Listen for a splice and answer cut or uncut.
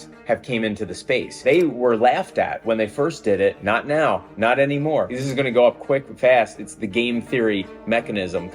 cut